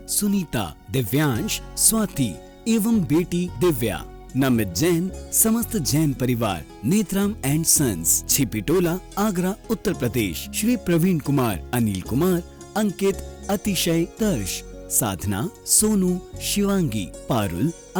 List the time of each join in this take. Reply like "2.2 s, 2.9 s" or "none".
none